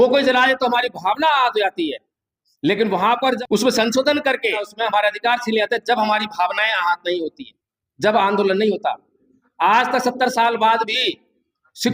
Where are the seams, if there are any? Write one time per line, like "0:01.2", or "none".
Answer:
0:03.4
0:04.7

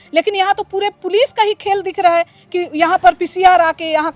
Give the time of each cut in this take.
none

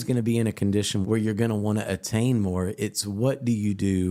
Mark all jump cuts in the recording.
0:01.0

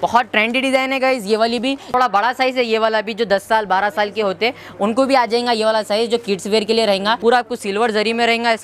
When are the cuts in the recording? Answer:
0:01.9
0:07.2

